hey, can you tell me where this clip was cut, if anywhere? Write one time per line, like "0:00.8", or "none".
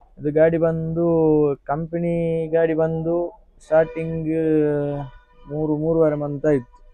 none